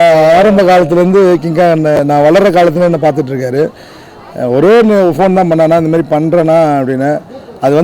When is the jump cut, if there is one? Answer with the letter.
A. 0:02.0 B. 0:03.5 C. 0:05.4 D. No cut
D